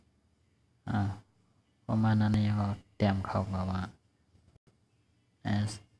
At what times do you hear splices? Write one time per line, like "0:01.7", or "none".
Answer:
none